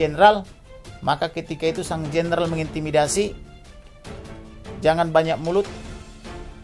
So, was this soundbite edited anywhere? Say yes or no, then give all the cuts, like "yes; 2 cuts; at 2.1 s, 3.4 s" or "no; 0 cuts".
yes; 1 cut; at 5.7 s